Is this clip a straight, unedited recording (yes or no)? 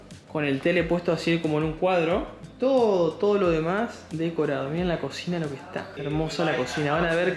yes